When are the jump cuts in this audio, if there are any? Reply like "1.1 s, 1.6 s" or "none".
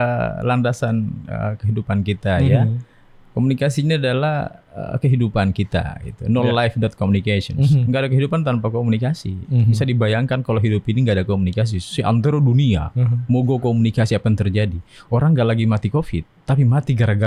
none